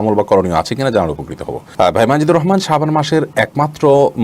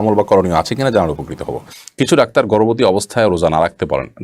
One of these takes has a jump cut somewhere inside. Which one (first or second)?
second